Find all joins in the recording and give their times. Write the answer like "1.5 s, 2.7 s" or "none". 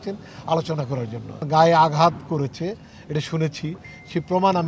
1.4 s